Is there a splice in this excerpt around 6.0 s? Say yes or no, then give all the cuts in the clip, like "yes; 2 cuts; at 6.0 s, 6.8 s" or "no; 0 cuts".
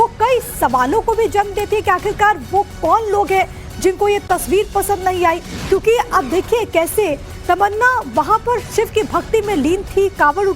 yes; 1 cut; at 6.0 s